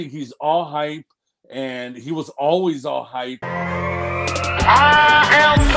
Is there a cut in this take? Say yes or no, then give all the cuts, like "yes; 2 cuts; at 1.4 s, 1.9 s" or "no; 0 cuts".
yes; 1 cut; at 3.4 s